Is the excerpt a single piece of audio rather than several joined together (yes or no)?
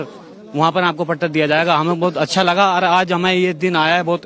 no